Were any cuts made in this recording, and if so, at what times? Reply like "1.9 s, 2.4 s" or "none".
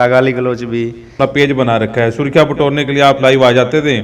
1.1 s